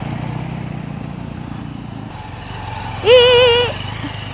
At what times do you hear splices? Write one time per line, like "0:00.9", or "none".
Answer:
0:02.1